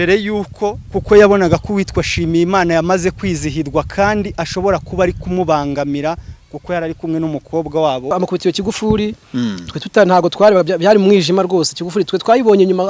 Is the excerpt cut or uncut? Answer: cut